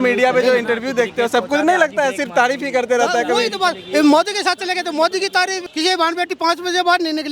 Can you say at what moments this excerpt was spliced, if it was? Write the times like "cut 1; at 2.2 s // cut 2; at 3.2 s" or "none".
cut 1; at 5.6 s